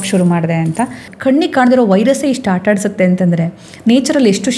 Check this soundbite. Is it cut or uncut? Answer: cut